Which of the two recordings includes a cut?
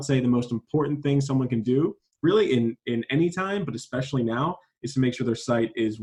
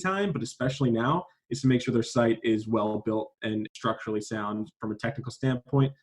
second; 1 cut; at 3.7 s

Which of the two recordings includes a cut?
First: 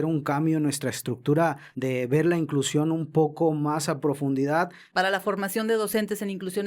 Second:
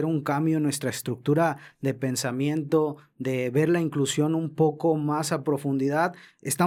first; 2 cuts; at 1.7 s, 4.8 s

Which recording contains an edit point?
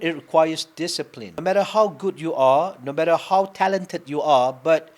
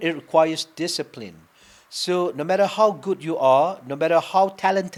first; 1 cut; at 1.3 s

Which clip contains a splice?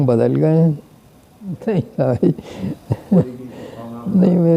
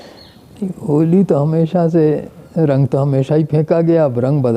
first; 1 cut; at 1.6 s

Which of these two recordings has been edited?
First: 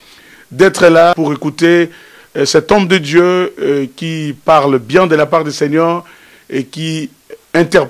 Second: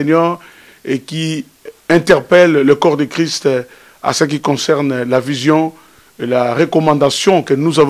first; 1 cut; at 1.1 s

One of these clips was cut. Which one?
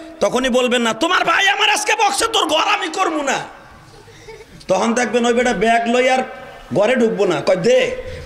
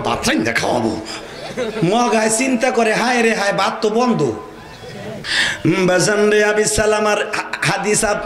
second; 1 cut; at 5.3 s

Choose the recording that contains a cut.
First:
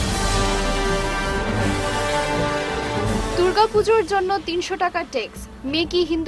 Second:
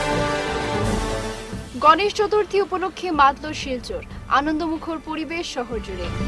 second; 1 cut; at 0.9 s

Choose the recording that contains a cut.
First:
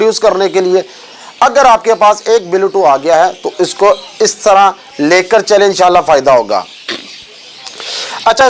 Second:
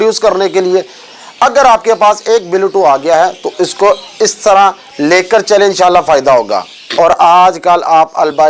second; 1 cut; at 6.8 s

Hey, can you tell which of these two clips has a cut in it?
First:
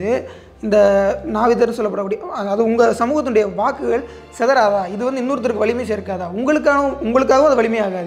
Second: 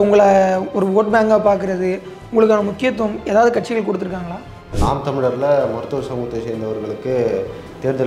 second; 1 cut; at 4.6 s

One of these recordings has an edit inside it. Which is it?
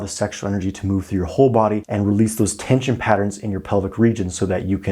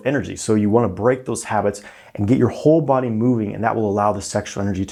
first; 1 cut; at 1.9 s

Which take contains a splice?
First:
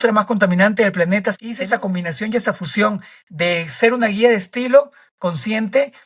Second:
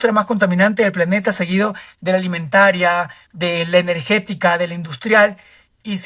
first; 1 cut; at 1.4 s

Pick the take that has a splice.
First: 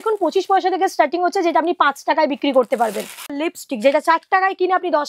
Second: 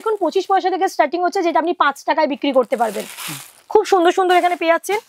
first; 1 cut; at 3.4 s

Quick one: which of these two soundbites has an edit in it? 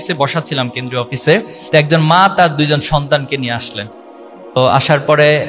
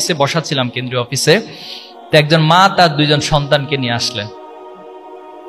first; 2 cuts; at 1.6 s, 4.6 s

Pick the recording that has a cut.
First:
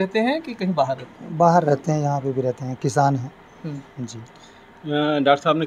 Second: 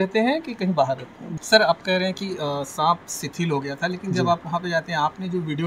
second; 1 cut; at 1.2 s

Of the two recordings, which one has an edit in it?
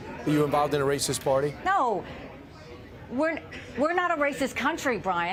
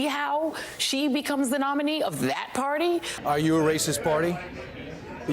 second; 1 cut; at 3.2 s

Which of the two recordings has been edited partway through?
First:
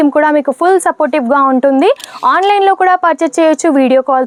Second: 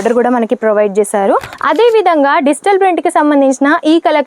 second; 1 cut; at 1.5 s

